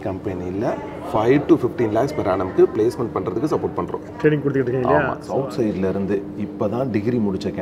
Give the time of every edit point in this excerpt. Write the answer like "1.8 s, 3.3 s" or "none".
5.2 s